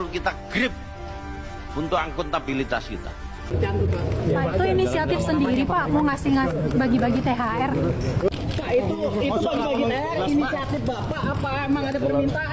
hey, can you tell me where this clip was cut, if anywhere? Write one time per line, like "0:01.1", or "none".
0:03.5